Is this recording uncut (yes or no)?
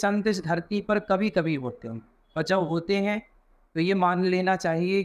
yes